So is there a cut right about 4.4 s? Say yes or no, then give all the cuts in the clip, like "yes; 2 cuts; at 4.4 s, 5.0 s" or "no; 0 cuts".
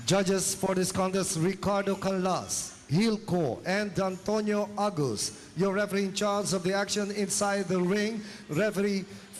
no; 1 cut; at 7.8 s